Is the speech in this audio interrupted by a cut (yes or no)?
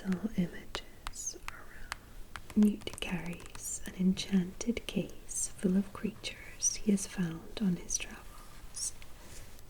yes